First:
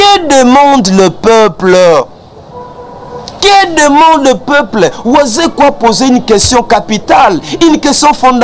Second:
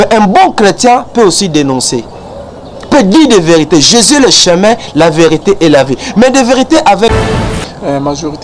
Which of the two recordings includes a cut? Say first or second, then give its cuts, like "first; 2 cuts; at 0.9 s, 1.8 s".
second; 1 cut; at 7.1 s